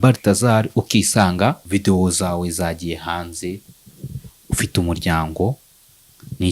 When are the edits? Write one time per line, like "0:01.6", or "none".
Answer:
0:01.6